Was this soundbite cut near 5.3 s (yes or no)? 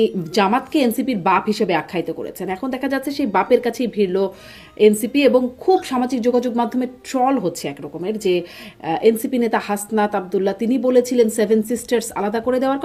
no